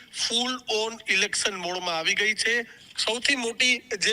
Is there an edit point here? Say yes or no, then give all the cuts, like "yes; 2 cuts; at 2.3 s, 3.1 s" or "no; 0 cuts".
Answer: yes; 1 cut; at 2.8 s